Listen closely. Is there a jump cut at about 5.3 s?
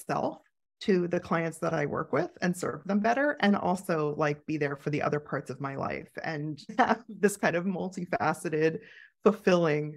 no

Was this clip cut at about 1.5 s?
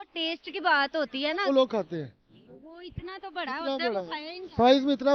yes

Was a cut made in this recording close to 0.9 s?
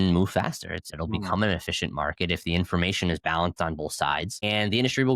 yes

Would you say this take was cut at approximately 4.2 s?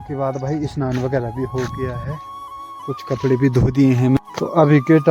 yes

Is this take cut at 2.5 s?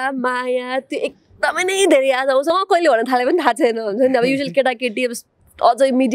yes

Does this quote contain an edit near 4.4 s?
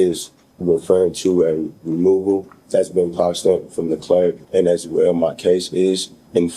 yes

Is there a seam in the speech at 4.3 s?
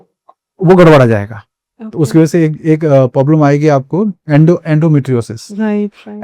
no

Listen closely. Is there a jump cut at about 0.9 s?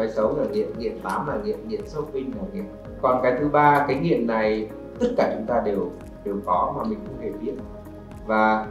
no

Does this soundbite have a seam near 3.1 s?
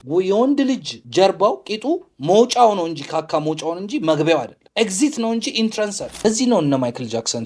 no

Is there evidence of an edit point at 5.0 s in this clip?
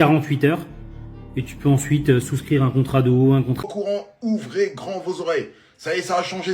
no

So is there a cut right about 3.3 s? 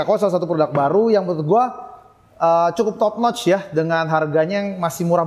no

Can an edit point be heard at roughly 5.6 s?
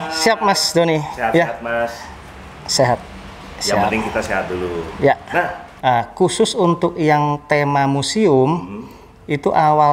yes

